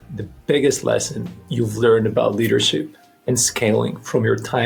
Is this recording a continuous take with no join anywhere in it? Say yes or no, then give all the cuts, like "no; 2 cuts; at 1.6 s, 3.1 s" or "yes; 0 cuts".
yes; 0 cuts